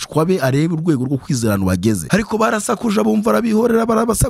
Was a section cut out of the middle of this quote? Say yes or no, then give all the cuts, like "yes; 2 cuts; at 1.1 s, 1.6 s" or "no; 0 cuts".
yes; 1 cut; at 2.0 s